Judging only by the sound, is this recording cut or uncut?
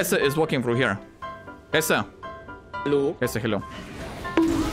uncut